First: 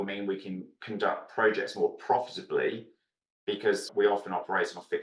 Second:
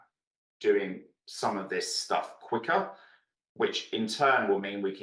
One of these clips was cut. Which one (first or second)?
first